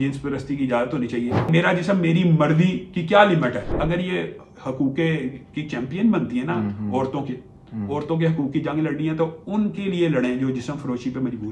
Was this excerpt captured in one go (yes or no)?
no